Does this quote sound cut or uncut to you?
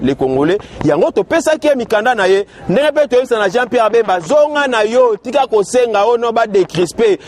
uncut